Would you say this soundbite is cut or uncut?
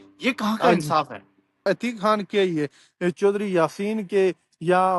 cut